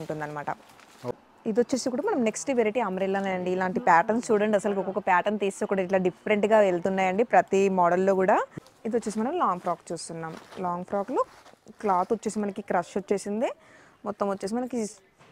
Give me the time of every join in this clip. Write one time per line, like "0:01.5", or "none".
0:01.0
0:08.5